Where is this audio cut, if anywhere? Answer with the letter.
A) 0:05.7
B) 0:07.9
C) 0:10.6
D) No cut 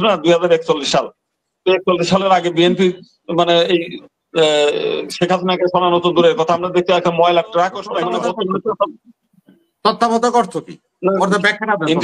B